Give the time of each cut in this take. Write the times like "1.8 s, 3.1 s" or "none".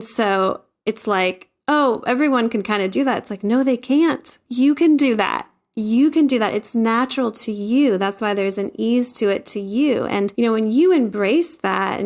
none